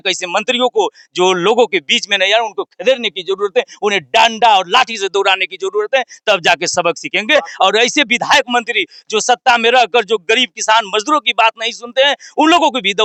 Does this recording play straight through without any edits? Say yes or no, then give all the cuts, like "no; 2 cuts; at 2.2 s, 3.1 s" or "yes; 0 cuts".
yes; 0 cuts